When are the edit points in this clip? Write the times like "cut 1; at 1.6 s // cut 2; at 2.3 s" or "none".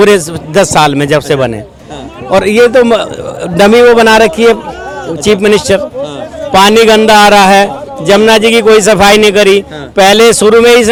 none